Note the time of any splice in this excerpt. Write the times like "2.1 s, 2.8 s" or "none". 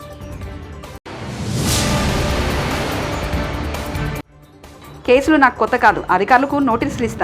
0.9 s